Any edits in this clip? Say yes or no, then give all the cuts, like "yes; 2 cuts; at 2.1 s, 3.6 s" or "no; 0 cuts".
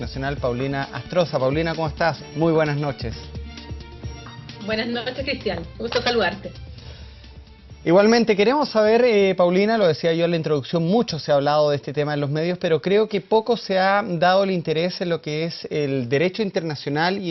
no; 0 cuts